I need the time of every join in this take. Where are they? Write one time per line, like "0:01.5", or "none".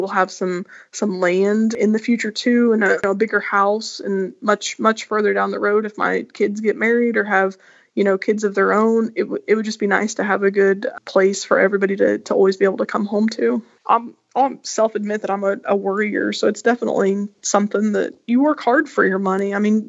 0:13.7